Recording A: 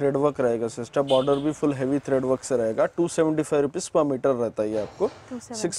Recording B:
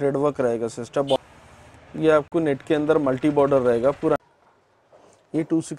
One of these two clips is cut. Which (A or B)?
B